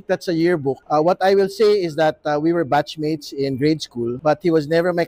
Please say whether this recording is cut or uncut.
cut